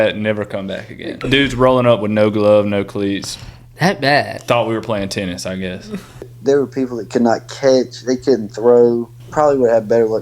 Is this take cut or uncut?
cut